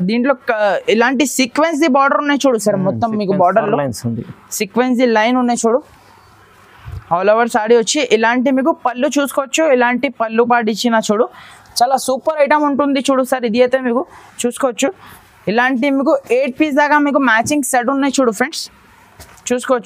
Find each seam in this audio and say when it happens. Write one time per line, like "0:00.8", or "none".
none